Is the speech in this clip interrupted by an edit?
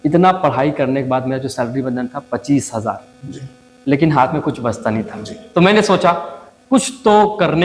no; 0 cuts

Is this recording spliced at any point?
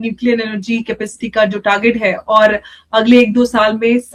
no; 0 cuts

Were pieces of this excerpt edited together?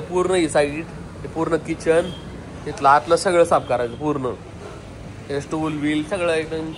no; 0 cuts

